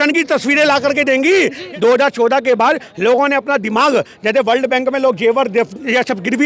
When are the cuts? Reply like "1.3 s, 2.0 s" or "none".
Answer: 1.6 s